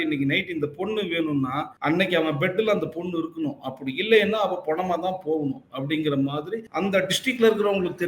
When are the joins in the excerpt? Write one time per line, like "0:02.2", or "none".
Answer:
0:01.7
0:06.6